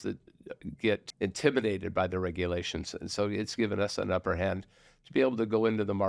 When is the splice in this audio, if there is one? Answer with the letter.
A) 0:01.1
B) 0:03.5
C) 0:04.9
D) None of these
A